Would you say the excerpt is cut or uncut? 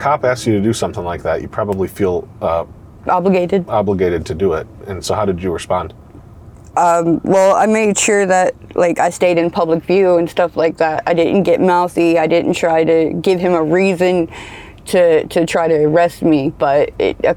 uncut